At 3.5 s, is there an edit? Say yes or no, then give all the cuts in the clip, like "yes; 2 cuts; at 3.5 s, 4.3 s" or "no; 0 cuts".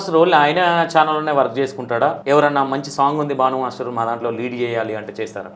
no; 1 cut; at 2.2 s